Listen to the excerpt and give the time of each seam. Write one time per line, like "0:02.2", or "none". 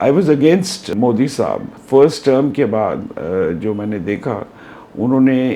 0:00.9
0:01.7